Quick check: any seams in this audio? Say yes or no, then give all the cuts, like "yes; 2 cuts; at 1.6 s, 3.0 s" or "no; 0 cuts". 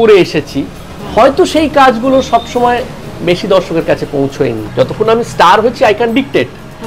yes; 1 cut; at 4.6 s